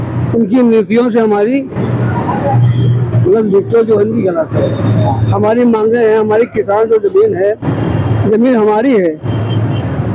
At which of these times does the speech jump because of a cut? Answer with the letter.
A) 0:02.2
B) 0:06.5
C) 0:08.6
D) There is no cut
D